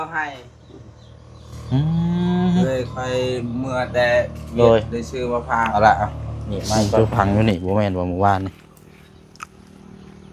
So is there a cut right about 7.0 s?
yes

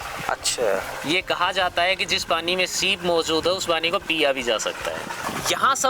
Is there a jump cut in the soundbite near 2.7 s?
no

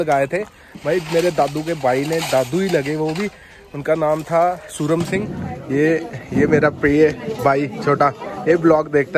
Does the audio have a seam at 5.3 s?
yes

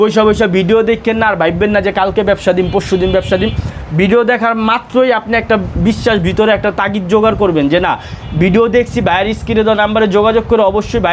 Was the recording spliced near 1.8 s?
no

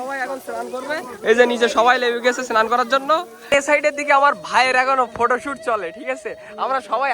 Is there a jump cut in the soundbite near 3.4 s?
yes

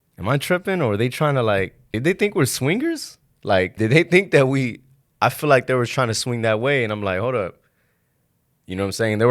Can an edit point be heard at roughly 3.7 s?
yes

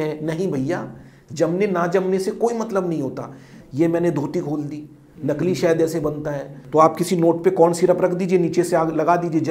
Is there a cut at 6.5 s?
yes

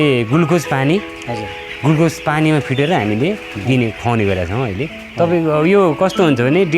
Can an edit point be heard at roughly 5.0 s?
yes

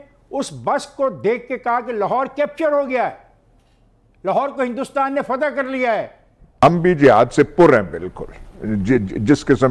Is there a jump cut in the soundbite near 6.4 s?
yes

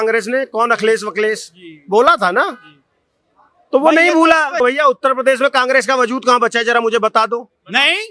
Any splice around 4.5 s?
yes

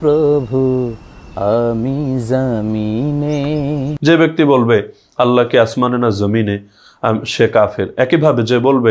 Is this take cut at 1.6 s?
no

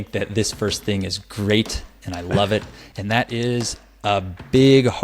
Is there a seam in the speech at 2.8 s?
yes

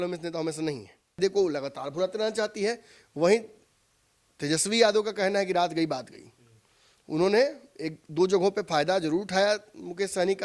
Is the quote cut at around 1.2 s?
yes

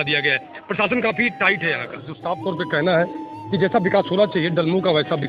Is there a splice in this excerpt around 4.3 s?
no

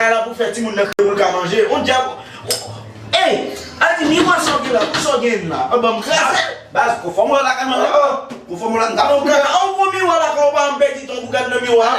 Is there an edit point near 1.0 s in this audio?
yes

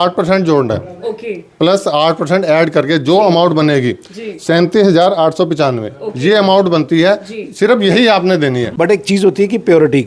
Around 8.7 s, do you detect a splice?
yes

